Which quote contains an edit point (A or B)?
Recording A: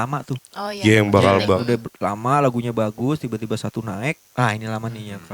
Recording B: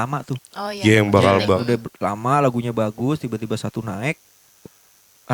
A